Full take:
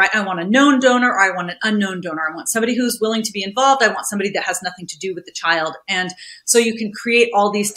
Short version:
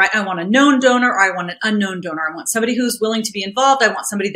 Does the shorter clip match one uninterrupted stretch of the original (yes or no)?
yes